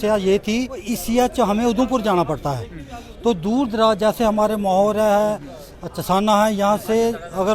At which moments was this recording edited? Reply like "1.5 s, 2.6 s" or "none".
0.9 s